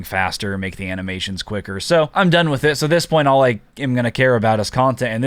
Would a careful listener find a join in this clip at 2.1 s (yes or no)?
yes